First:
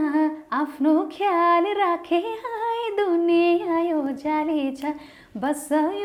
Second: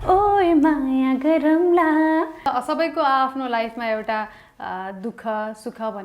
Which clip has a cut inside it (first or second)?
second